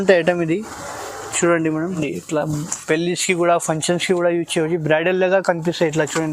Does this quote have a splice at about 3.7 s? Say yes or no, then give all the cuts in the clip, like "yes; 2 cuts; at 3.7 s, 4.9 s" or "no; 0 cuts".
no; 1 cut; at 2.0 s